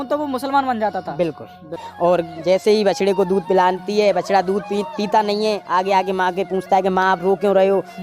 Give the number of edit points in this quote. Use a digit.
1